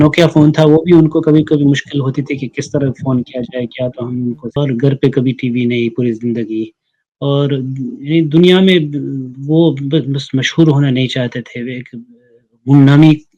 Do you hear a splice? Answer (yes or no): yes